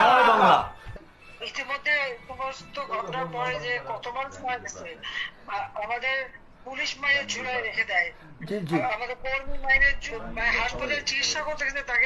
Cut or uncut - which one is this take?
cut